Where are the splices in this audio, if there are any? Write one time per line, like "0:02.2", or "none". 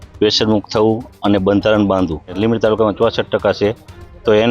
0:02.3